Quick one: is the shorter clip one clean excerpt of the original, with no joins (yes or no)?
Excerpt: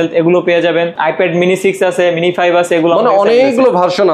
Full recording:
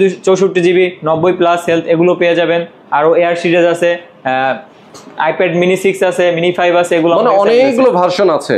no